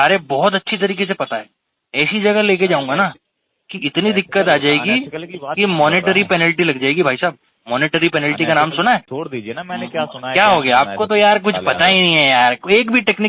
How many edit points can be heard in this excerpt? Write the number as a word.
one